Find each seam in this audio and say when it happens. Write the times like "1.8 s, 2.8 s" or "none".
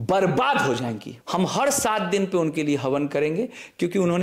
1.1 s